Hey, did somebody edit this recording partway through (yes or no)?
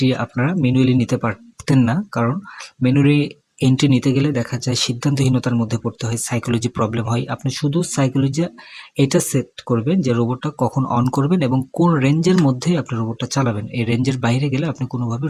no